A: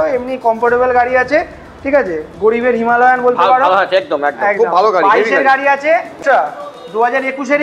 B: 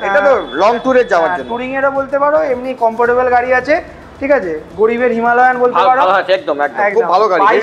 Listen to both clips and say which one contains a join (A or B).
A